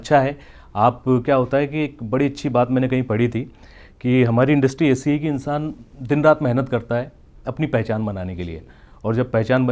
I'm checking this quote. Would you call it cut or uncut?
uncut